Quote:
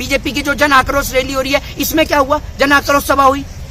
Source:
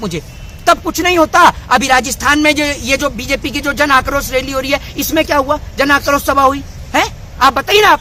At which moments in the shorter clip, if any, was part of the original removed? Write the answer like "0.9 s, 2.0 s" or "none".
none